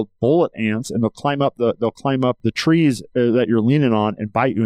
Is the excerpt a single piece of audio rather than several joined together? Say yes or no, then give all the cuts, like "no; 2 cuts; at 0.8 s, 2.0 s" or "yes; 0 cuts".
no; 1 cut; at 2.4 s